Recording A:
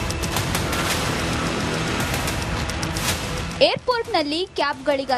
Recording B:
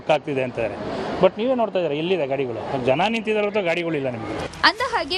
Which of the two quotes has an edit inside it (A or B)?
A